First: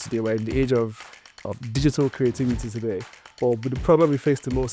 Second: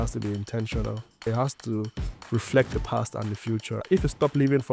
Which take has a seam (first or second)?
second